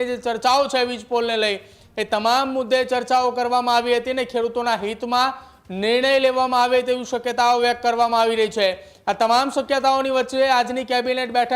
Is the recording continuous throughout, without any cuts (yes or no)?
yes